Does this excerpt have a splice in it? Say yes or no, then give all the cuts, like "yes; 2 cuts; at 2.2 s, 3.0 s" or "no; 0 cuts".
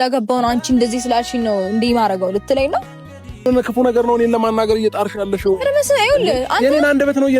yes; 1 cut; at 3.5 s